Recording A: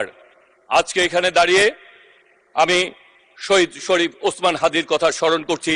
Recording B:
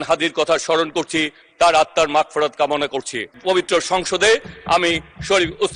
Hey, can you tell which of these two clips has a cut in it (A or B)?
B